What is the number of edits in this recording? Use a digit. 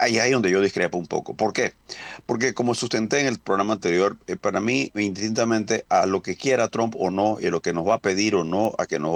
0